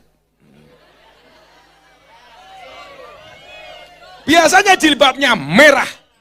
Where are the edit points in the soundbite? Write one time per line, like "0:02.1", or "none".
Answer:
none

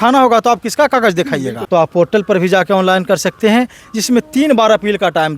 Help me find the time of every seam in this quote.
0:01.6

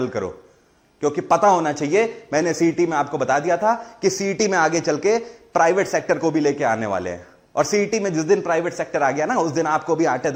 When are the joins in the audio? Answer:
none

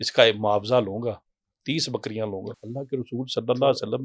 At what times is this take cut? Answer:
0:02.5

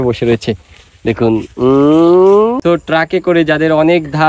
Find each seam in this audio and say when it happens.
0:02.6

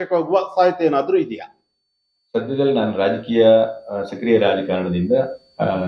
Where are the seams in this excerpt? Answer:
none

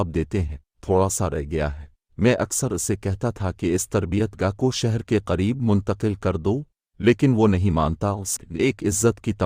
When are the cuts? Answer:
0:08.2

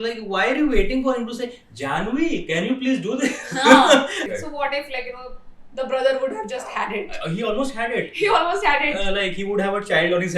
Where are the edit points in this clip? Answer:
0:04.2

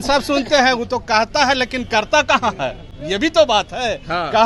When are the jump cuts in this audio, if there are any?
none

